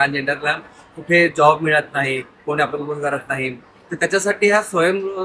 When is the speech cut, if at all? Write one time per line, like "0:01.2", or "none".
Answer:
none